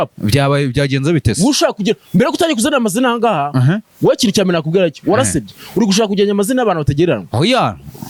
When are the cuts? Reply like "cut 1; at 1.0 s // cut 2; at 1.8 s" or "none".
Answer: none